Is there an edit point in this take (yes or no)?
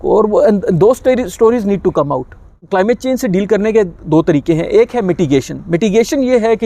yes